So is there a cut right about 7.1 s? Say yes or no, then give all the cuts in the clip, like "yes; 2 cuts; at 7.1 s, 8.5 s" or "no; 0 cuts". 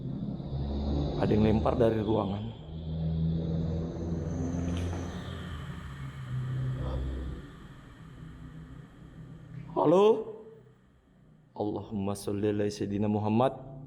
no; 0 cuts